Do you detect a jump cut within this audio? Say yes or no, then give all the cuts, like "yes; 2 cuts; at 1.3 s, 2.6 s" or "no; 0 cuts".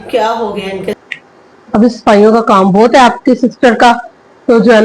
yes; 1 cut; at 1.0 s